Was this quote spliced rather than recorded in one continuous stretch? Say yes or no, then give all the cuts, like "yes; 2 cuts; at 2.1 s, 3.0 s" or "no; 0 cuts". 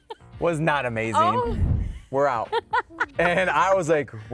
yes; 1 cut; at 1.7 s